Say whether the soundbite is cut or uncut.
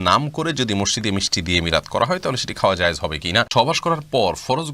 cut